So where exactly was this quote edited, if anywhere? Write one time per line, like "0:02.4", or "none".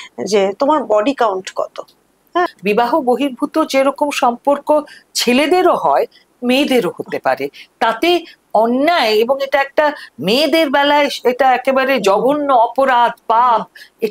0:02.5

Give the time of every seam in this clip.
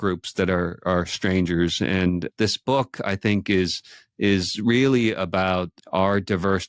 0:02.3
0:05.7

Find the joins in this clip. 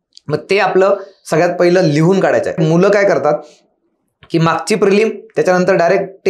0:02.6

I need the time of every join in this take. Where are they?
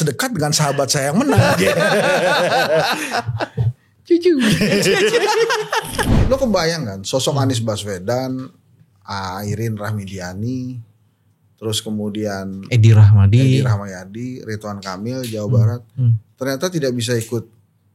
0:06.1

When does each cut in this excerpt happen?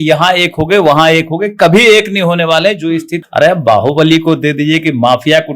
0:03.2

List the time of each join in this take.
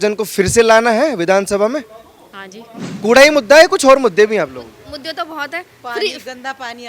0:02.9

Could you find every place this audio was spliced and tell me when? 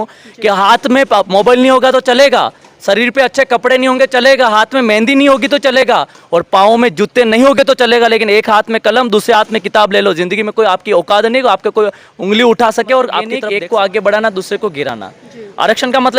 0:13.4

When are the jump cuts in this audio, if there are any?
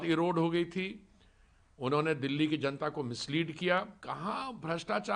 0:04.0

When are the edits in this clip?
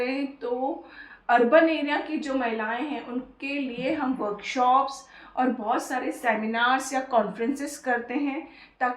none

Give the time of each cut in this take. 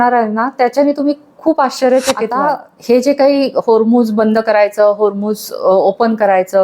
0:02.3

